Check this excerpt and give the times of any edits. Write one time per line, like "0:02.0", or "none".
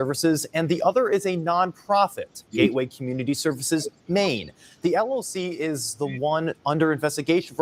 none

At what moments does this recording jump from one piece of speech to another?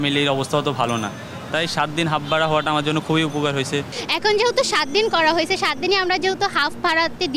0:03.9

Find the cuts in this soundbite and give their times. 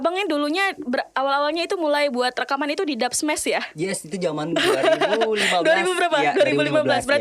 none

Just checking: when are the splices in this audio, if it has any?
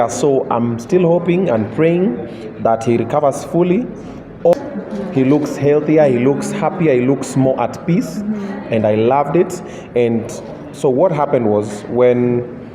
0:04.5

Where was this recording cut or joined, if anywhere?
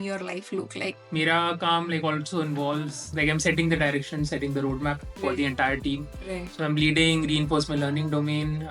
0:00.9
0:03.1

